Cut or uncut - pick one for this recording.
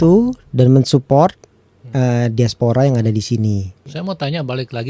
uncut